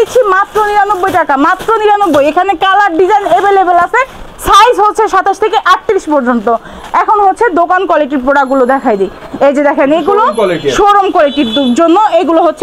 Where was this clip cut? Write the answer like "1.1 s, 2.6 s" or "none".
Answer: none

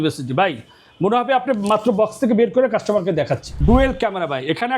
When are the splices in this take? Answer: 3.5 s

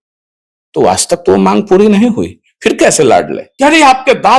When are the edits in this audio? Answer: 3.4 s

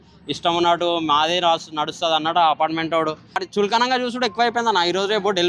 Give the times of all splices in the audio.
3.5 s

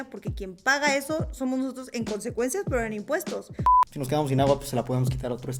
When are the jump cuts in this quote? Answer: 3.6 s

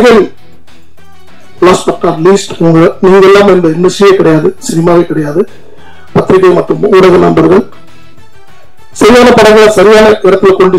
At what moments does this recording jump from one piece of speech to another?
none

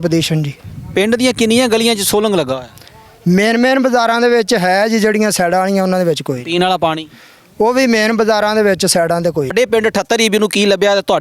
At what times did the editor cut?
9.5 s

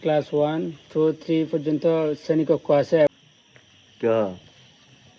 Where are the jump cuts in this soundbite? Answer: 3.1 s

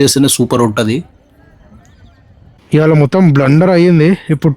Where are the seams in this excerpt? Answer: 2.5 s

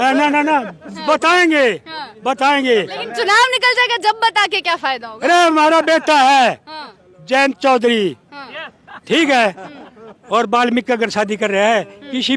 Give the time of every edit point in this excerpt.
none

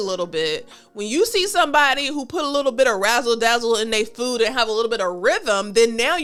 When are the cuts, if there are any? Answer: none

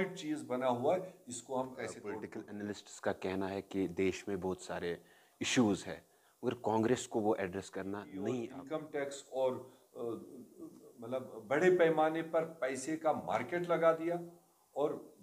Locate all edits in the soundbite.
2.4 s, 8.6 s

